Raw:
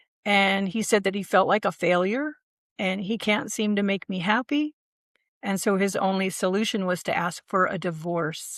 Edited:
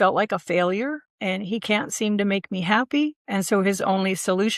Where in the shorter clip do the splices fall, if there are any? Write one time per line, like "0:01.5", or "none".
0:01.1
0:03.2